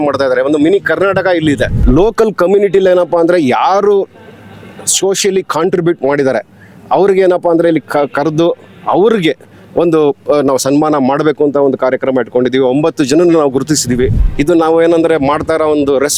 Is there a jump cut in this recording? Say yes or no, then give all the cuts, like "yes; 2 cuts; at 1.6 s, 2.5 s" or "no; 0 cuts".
yes; 2 cuts; at 1.8 s, 14.2 s